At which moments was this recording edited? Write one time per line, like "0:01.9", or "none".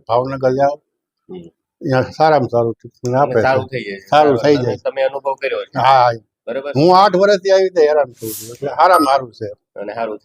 none